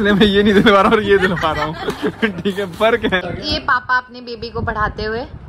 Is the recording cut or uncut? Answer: cut